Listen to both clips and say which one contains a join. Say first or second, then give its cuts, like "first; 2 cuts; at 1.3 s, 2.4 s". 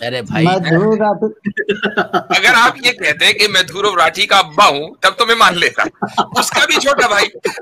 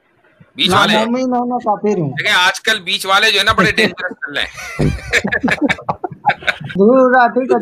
second; 1 cut; at 6.7 s